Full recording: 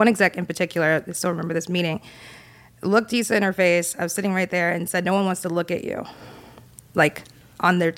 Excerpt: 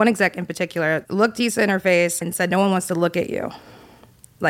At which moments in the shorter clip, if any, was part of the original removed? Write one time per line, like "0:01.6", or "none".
0:01.1
0:02.3